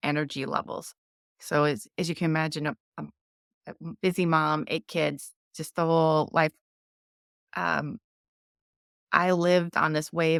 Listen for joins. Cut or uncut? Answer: uncut